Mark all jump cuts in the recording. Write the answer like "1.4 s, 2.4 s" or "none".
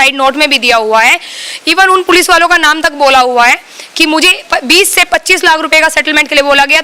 none